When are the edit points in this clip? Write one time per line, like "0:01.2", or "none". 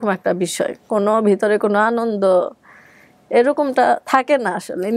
none